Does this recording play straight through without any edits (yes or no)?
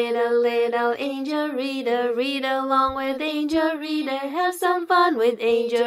yes